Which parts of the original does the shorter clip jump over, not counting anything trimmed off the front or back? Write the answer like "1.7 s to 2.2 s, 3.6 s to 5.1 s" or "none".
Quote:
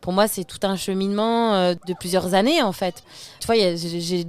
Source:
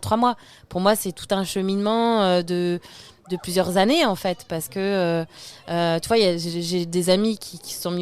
2.5 s to 3.2 s, 4.8 s to 6.0 s